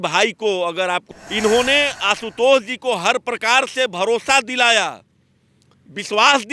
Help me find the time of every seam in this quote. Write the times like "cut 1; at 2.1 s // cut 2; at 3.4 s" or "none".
cut 1; at 1.1 s